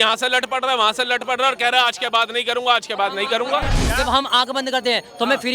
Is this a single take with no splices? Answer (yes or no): no